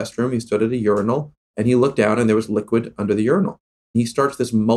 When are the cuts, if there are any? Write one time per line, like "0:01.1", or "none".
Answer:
0:01.4
0:03.8